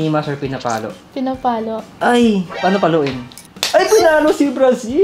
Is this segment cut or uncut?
cut